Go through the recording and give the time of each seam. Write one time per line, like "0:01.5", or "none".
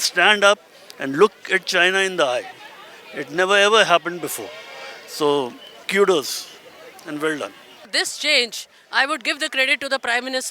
0:07.9